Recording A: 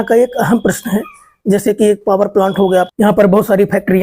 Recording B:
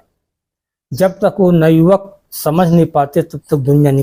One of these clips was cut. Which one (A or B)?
A